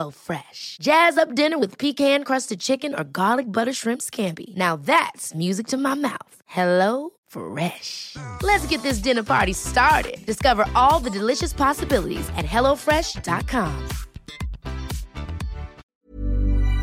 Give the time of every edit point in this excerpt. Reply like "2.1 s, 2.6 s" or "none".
15.8 s